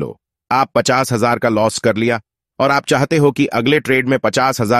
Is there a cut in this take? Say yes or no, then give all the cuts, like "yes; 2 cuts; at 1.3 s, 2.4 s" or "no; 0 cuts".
no; 0 cuts